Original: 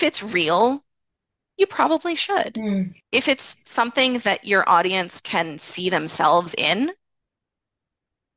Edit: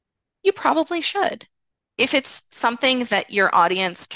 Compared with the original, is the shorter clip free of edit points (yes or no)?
yes